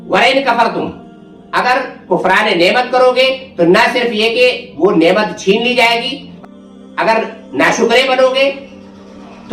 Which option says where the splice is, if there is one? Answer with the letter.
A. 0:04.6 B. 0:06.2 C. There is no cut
B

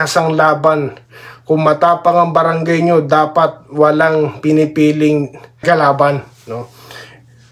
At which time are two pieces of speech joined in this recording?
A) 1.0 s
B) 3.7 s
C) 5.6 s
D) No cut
C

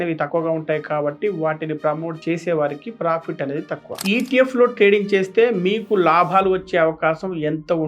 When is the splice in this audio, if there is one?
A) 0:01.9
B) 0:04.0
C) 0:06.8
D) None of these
B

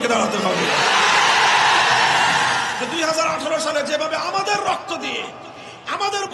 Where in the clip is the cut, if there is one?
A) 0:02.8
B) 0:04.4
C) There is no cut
A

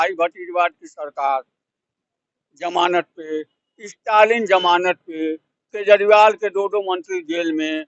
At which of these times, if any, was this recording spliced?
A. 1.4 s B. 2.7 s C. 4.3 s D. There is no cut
D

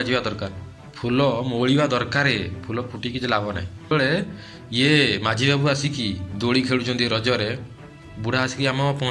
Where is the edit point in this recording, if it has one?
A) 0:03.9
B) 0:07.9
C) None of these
A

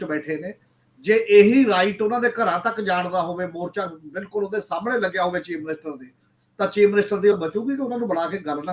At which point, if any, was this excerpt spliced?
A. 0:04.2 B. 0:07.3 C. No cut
B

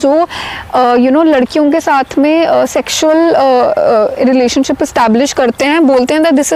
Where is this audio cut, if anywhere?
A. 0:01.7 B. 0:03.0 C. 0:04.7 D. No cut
D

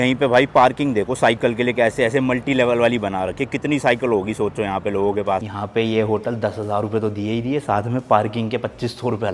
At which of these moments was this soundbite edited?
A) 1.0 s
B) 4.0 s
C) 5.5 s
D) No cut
C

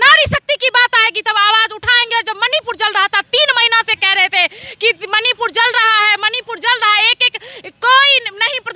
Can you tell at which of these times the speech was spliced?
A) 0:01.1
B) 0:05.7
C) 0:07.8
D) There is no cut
D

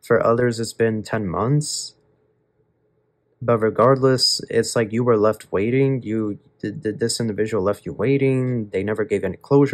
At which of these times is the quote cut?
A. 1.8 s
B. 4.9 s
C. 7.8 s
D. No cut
D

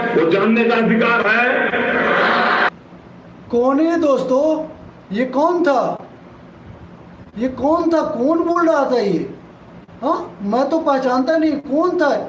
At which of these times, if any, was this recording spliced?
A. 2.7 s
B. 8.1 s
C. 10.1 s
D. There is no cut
A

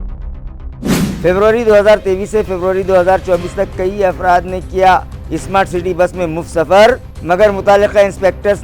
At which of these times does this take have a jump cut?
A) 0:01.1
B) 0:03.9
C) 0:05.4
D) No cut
A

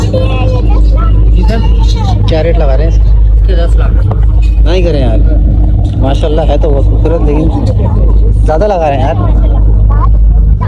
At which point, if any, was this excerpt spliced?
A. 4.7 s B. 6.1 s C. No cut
C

